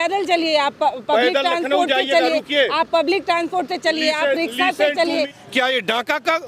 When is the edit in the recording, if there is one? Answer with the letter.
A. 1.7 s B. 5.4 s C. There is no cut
B